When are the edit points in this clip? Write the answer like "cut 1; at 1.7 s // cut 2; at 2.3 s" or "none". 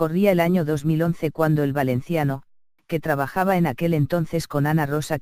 cut 1; at 2.8 s